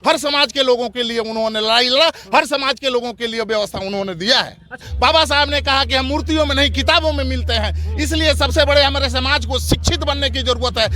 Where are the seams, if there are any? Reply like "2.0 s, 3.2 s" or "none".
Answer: 4.9 s